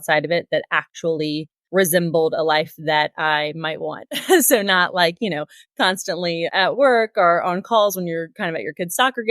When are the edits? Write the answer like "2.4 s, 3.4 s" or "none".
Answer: 1.5 s